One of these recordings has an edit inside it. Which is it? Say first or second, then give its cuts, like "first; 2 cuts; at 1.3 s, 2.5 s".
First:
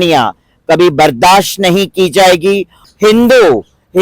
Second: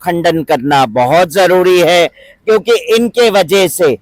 first; 1 cut; at 2.8 s